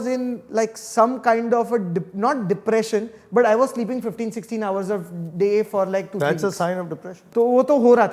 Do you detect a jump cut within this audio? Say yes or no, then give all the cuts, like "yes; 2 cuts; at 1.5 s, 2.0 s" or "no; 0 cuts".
yes; 1 cut; at 7.2 s